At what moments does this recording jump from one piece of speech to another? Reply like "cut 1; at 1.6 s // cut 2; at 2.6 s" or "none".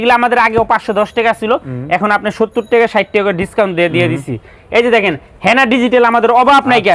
none